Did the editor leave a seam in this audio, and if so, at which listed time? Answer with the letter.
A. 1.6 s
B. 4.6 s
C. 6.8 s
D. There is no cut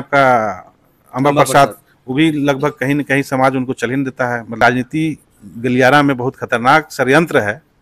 B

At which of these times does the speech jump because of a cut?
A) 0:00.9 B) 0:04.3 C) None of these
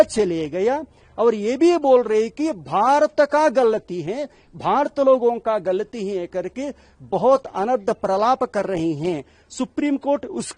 C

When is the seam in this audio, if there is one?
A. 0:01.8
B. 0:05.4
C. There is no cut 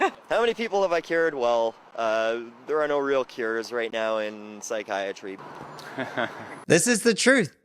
C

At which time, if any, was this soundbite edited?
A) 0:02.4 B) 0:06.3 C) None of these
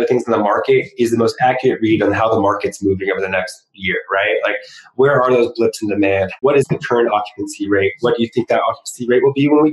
B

